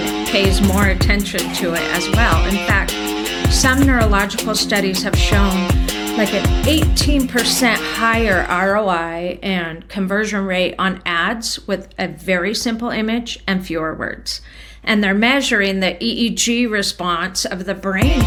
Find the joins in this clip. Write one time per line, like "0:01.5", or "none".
none

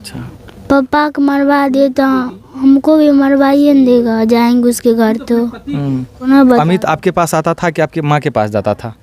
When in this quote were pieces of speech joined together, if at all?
0:06.3

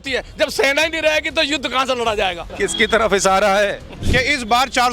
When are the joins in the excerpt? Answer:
0:02.5
0:03.9

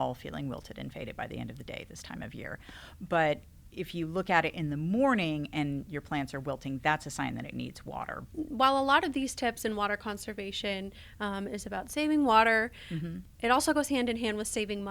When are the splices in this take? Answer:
0:08.2
0:13.2

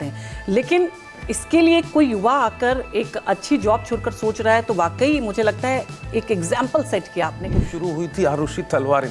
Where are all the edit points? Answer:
0:07.6

